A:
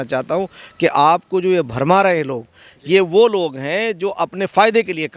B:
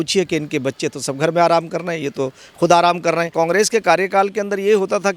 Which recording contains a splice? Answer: B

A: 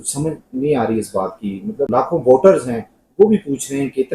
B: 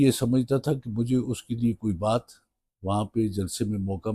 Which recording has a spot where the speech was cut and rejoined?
A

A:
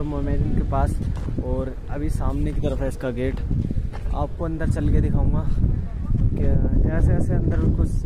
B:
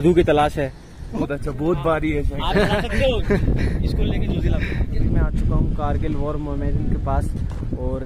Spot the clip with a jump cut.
B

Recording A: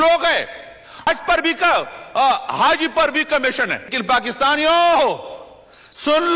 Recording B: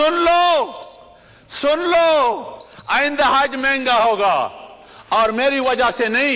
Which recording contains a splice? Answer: A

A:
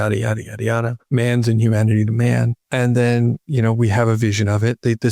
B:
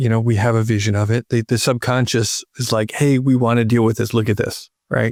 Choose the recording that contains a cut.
A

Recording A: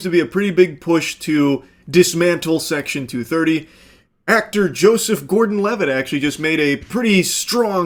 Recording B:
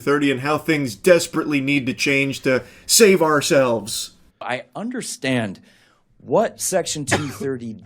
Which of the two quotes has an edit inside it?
B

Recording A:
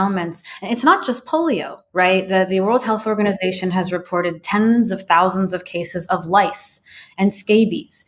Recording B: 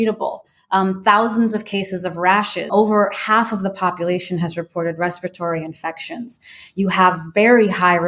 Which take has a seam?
B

